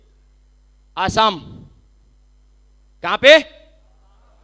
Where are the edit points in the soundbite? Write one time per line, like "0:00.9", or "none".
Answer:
none